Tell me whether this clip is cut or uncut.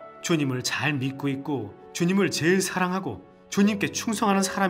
uncut